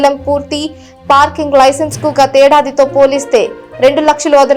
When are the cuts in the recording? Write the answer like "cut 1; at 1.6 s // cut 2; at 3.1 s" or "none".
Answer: none